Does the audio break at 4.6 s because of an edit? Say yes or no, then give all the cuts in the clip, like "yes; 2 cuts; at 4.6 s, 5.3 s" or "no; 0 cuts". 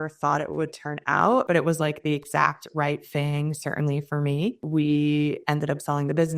yes; 2 cuts; at 1.5 s, 4.6 s